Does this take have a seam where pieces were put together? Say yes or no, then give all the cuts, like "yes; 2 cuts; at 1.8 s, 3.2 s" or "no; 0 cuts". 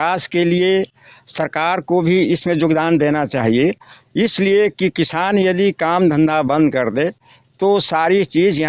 no; 0 cuts